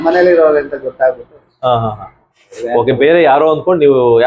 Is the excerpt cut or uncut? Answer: uncut